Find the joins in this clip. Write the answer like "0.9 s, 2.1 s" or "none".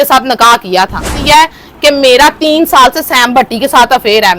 1.2 s